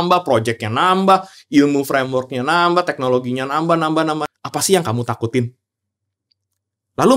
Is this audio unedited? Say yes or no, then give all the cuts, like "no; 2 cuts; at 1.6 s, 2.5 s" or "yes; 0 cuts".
no; 1 cut; at 4.3 s